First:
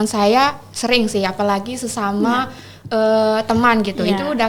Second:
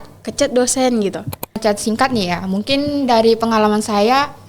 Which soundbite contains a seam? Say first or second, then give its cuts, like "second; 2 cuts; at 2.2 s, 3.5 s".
second; 1 cut; at 1.6 s